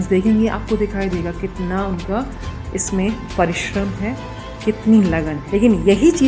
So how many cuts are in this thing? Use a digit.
1